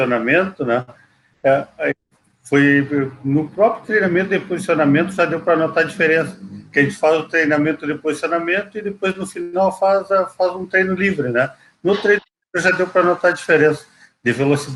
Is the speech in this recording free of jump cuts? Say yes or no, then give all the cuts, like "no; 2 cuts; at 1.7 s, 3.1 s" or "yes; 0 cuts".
yes; 0 cuts